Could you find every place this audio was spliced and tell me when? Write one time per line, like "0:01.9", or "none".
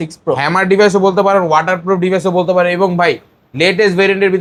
none